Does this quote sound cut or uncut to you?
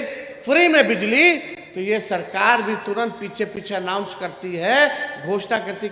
uncut